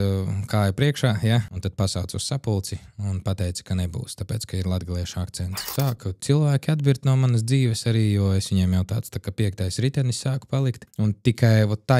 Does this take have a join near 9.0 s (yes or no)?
no